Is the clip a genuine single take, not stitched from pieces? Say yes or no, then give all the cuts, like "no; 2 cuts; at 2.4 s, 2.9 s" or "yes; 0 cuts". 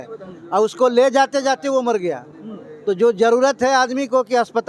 yes; 0 cuts